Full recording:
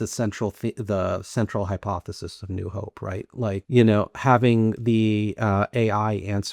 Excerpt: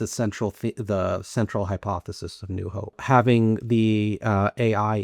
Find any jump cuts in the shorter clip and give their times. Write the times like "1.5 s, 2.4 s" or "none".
3.0 s